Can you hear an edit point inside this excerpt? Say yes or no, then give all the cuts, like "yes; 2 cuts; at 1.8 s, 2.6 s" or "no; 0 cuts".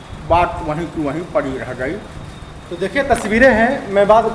no; 0 cuts